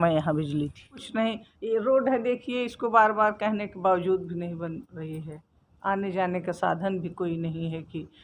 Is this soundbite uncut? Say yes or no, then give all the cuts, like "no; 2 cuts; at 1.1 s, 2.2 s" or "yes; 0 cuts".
no; 1 cut; at 1.0 s